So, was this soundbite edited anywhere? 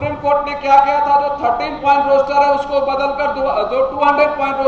no; 0 cuts

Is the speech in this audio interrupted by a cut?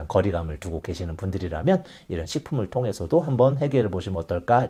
no; 0 cuts

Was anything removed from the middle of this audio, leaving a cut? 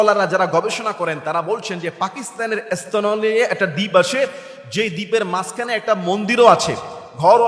no; 0 cuts

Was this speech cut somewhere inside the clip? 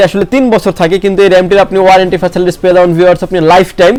no; 0 cuts

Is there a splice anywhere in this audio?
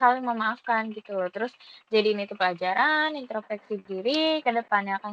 no; 0 cuts

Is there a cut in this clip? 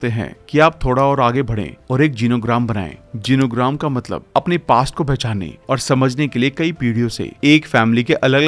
no; 0 cuts

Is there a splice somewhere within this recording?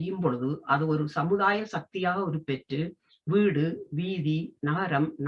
no; 0 cuts

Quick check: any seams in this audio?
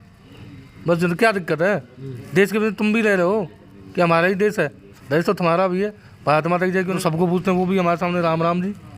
yes; 1 cut; at 7.0 s

